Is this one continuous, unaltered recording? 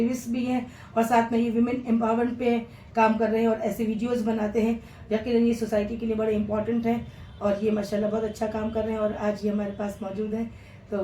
yes; 0 cuts

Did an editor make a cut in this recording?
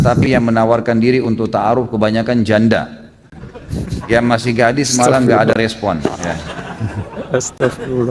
no; 0 cuts

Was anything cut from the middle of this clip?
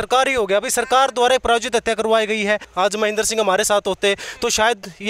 yes; 1 cut; at 2.7 s

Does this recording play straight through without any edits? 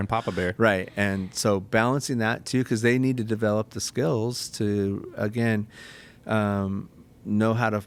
yes; 0 cuts

